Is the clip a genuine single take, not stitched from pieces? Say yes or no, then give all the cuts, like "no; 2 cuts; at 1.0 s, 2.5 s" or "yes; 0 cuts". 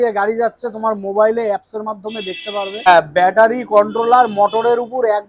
no; 1 cut; at 2.9 s